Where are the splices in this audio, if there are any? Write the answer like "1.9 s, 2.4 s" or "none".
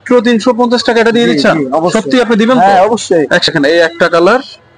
3.5 s